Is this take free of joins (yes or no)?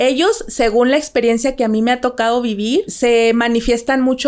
no